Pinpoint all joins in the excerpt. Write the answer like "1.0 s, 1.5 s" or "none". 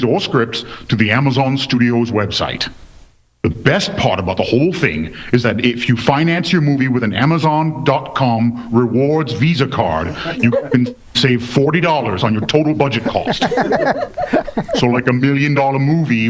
2.1 s